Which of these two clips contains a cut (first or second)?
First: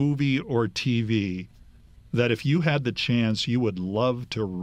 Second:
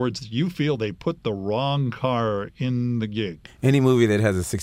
second